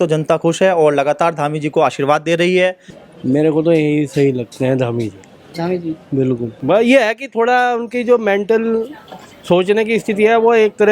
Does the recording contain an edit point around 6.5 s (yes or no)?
yes